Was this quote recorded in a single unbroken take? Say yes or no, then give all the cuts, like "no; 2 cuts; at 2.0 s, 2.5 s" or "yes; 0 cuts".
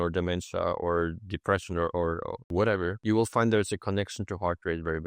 no; 2 cuts; at 2.4 s, 3.0 s